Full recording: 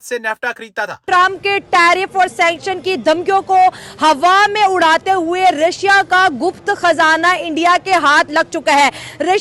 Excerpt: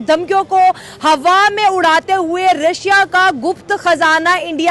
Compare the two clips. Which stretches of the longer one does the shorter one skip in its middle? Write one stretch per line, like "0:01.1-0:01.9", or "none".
none